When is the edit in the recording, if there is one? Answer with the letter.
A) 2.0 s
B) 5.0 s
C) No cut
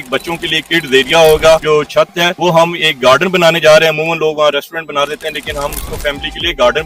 A